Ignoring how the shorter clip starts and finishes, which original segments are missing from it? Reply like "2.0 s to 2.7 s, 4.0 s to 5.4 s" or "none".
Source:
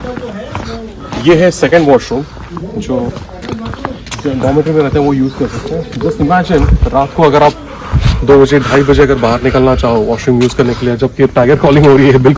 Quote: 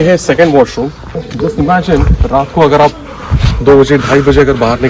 2.5 s to 5.8 s